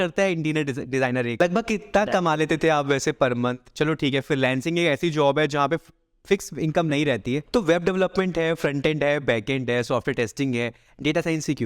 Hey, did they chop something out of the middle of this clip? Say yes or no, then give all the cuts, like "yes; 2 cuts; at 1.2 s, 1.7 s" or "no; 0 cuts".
yes; 2 cuts; at 1.4 s, 7.4 s